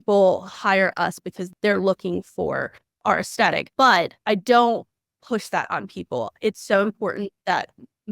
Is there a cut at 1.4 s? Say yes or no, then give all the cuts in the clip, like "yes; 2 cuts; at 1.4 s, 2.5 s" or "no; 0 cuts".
yes; 3 cuts; at 1.4 s, 2.9 s, 4.1 s